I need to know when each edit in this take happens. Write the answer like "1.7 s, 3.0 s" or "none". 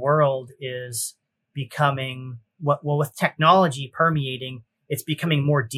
none